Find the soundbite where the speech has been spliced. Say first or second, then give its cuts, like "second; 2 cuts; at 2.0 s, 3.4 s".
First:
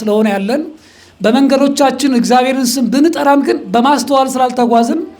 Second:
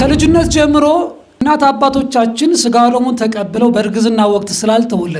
second; 1 cut; at 1.3 s